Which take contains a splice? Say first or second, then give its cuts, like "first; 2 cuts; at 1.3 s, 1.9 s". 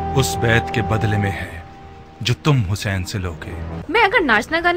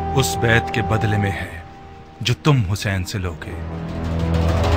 first; 1 cut; at 3.7 s